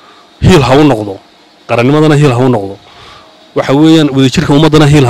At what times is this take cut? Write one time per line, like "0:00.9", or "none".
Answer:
none

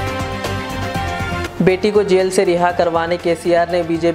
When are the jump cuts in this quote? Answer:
0:01.4

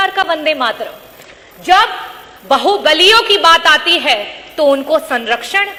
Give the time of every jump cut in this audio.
none

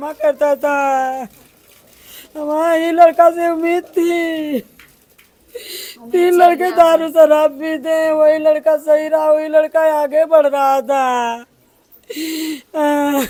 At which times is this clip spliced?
none

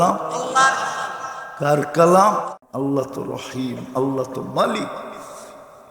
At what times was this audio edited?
0:02.6

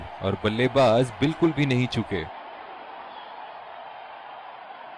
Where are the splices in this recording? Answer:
0:02.2
0:03.9

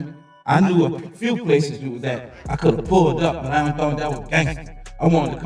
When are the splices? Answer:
none

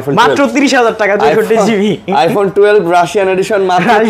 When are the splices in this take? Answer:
none

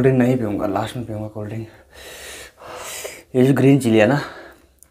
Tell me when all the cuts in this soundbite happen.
0:02.8

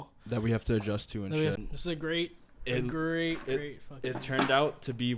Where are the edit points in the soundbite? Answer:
0:01.6

